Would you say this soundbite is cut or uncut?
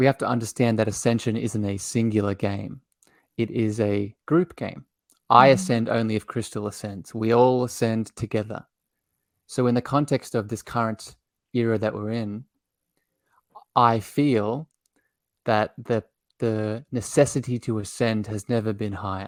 uncut